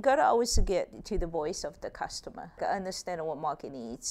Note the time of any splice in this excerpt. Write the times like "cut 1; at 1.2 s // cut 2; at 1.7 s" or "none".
cut 1; at 1.0 s // cut 2; at 2.6 s